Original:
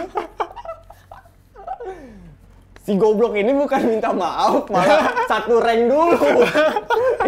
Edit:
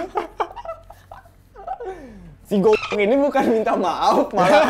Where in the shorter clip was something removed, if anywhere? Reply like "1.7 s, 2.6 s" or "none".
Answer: 2.3 s